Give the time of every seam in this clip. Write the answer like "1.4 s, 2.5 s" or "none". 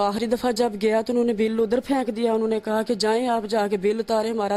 none